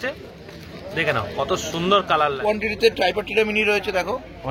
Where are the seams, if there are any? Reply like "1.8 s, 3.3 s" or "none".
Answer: 2.0 s